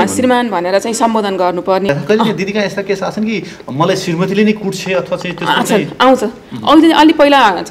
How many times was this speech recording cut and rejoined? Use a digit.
1